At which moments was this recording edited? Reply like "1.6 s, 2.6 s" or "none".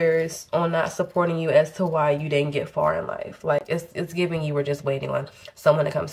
none